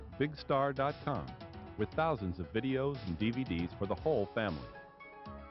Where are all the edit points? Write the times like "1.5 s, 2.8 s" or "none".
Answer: 4.6 s